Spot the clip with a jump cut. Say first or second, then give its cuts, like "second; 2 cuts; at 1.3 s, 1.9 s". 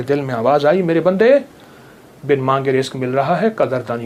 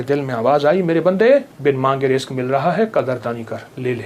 second; 1 cut; at 1.5 s